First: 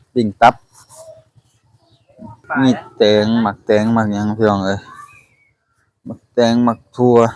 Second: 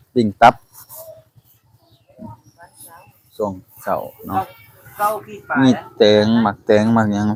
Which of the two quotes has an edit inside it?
first; 1 cut; at 2.3 s

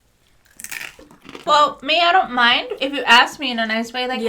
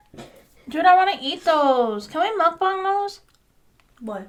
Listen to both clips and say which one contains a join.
first; 1 cut; at 1.4 s

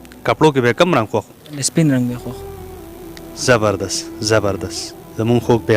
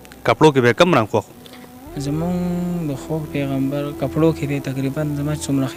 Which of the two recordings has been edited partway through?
first; 1 cut; at 1.6 s

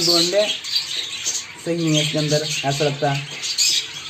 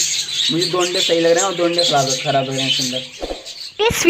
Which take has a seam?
second; 1 cut; at 3.1 s

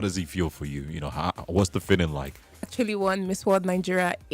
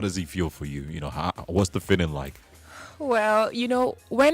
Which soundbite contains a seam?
first; 1 cut; at 2.7 s

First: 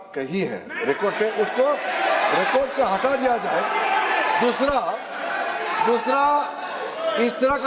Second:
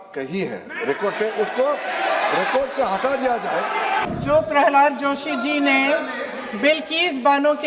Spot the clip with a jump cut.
second; 1 cut; at 4.1 s

